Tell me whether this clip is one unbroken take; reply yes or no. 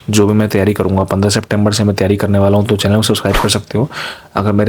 yes